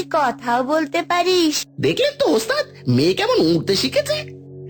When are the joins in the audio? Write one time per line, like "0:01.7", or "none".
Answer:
0:01.7